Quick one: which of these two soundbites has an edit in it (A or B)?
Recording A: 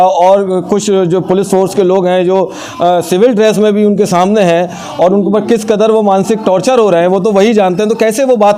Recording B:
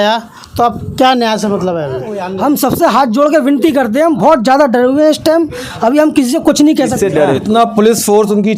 B